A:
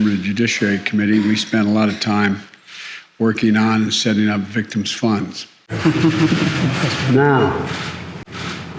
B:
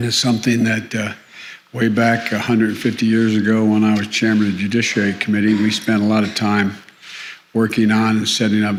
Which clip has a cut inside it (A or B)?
A